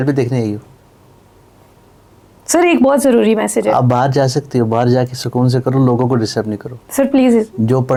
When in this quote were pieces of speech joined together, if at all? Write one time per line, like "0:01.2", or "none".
none